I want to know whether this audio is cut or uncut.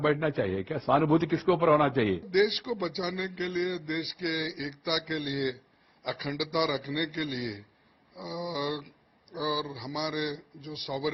uncut